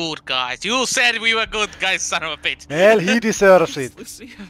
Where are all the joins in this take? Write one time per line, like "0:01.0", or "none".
0:02.5